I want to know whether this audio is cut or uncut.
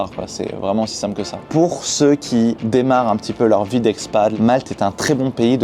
cut